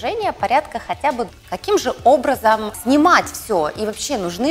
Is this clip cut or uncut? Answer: cut